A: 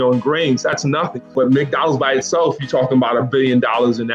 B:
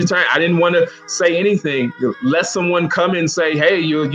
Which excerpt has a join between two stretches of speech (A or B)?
A